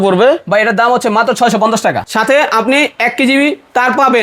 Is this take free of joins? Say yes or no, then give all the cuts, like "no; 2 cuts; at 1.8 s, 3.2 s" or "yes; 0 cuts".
no; 1 cut; at 2.0 s